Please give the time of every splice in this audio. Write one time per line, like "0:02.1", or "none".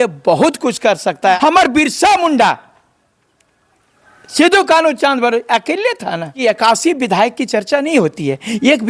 0:01.4
0:06.4